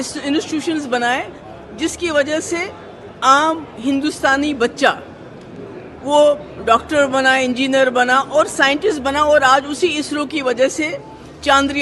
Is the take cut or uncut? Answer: uncut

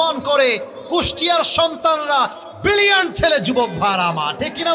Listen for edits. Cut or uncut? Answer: uncut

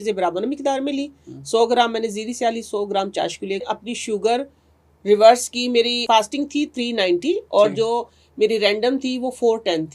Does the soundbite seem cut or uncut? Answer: cut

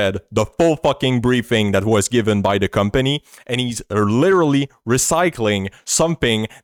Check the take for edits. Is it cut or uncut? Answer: uncut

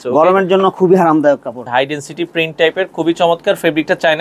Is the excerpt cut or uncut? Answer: cut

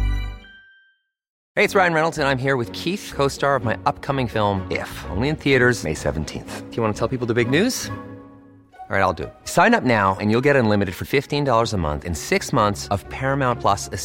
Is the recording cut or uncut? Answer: cut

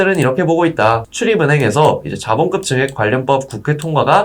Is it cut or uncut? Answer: cut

